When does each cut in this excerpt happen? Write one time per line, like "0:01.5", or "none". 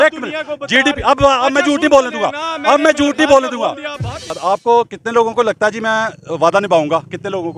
0:04.4

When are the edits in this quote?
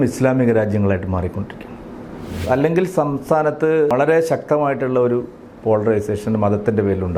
0:02.4
0:03.9

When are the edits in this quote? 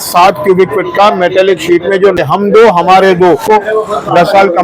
0:01.9
0:03.4

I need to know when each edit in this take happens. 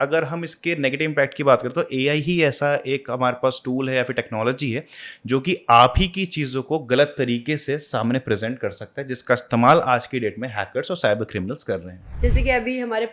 0:12.0

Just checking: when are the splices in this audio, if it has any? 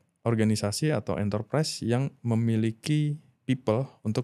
none

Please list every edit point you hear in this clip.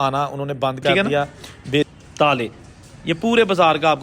0:01.9

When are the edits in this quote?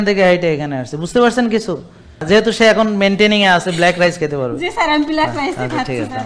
0:02.2

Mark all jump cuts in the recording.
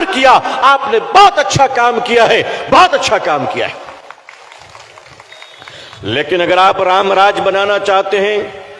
0:04.2

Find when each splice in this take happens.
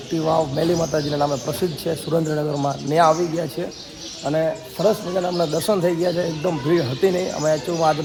none

